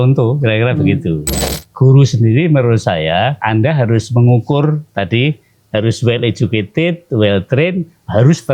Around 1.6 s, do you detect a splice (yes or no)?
yes